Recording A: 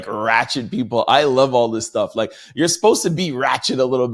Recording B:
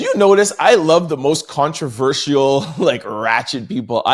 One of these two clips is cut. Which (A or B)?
A